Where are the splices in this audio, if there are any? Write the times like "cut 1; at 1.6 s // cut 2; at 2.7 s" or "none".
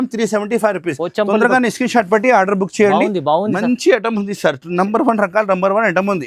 none